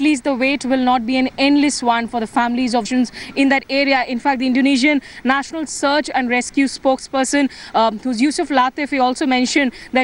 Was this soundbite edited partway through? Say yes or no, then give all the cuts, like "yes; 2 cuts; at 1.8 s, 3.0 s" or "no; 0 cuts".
no; 0 cuts